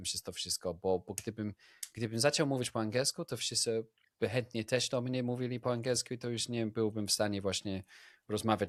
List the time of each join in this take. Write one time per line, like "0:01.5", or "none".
none